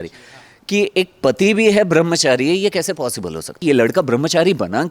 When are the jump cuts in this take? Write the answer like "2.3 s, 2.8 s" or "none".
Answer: 3.6 s